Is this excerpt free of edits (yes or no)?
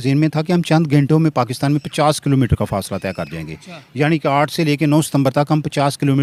yes